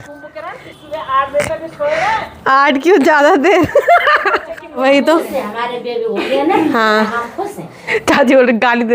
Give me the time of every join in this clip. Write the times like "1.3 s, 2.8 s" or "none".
4.8 s, 8.0 s